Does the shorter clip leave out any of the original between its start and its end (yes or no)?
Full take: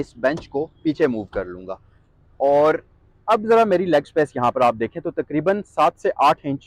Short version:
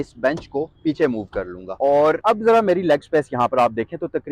yes